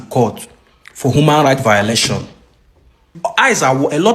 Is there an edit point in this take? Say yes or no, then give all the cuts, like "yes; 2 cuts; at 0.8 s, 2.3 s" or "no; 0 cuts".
yes; 1 cut; at 3.1 s